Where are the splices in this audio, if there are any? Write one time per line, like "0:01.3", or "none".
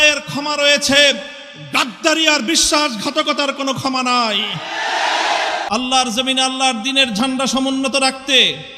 0:05.6

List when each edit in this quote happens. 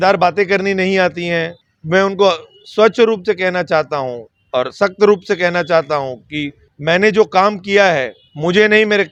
none

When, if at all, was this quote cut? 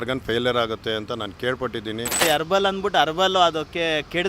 0:02.2

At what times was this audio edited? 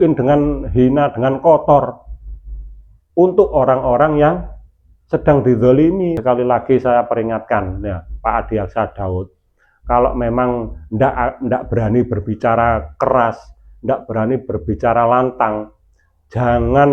0:06.2

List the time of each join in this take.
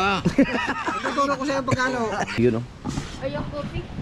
0:02.4

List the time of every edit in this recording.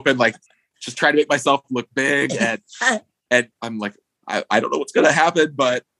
none

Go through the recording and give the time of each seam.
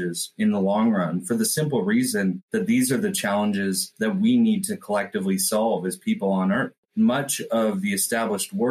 0:06.8

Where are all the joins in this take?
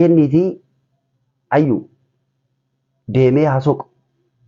none

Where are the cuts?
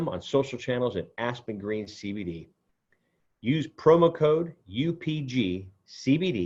none

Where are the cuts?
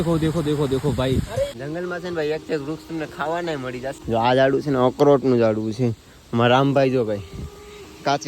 0:01.5
0:04.0

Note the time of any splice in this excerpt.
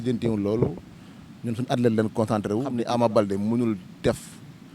0:02.7

